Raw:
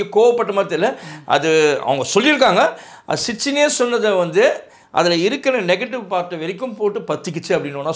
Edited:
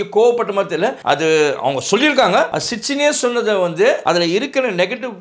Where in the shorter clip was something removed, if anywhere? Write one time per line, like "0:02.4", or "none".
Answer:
0:01.0
0:02.6
0:04.0